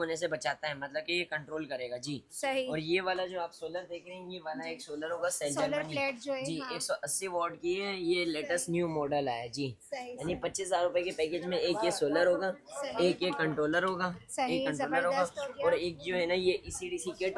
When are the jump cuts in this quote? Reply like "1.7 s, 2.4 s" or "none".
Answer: none

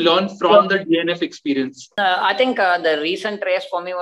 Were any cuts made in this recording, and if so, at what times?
1.9 s

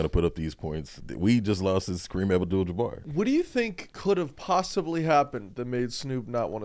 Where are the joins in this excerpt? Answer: 1.0 s, 3.1 s, 3.8 s

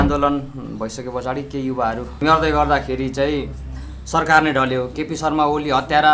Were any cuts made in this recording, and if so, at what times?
2.2 s

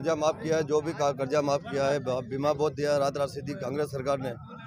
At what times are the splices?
none

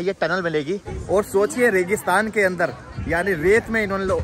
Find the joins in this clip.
0.9 s

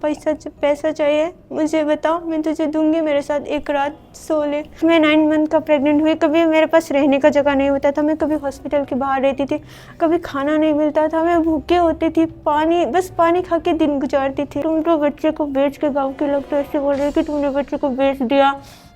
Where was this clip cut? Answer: 4.8 s, 14.6 s

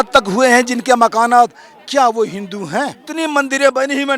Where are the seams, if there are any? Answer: 3.0 s

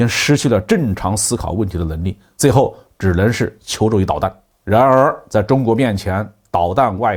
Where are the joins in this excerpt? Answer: none

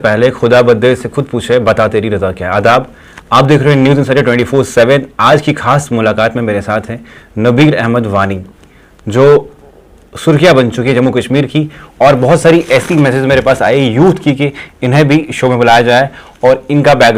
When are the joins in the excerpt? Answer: none

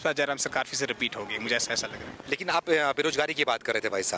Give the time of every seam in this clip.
none

